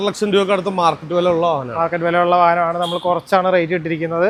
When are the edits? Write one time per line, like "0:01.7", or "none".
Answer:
none